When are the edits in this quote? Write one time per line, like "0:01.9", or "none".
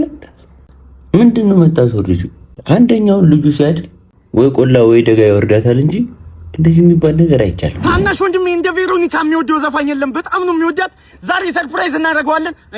0:07.8